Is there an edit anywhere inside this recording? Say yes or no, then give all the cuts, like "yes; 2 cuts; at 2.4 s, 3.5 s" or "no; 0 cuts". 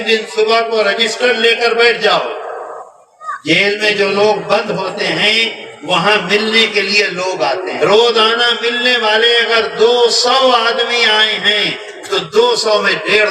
yes; 1 cut; at 7.7 s